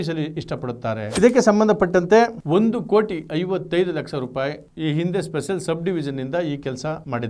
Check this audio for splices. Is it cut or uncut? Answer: cut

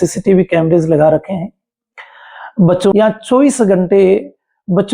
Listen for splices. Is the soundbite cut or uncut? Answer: cut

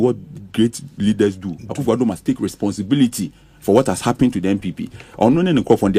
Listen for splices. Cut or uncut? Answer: uncut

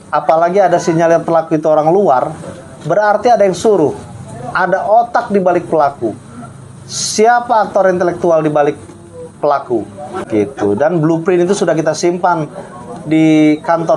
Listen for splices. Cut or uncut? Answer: cut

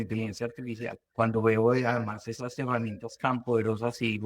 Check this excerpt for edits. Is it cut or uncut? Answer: cut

